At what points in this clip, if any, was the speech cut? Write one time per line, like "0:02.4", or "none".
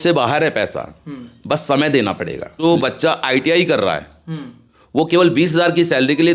0:02.6